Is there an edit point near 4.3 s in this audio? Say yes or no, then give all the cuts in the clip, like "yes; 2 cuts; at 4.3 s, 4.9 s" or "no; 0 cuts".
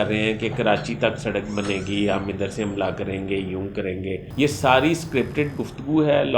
yes; 1 cut; at 4.3 s